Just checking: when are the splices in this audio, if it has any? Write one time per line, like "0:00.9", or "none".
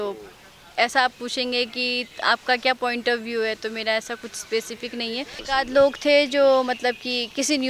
0:05.4